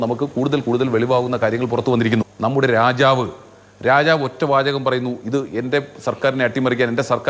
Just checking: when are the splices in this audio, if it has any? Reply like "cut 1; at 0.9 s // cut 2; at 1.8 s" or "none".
cut 1; at 2.3 s